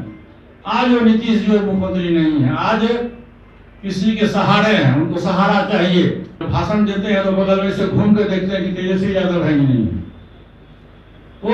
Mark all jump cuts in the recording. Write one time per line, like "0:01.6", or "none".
0:06.3